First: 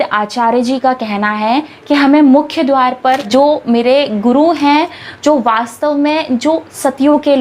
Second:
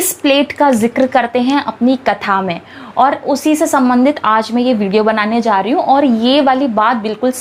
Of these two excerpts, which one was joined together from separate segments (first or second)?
first